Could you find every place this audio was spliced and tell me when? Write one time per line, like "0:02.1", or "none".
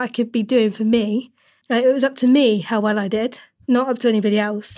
0:03.5